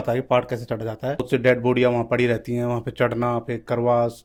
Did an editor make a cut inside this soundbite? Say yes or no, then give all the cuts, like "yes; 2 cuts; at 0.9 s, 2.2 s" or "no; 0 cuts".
no; 0 cuts